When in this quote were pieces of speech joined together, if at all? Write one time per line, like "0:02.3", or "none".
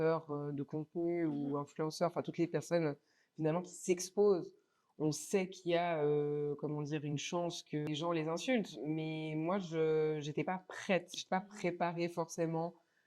0:07.9